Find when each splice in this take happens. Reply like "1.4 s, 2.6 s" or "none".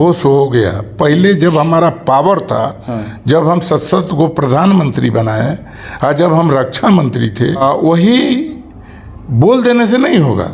7.6 s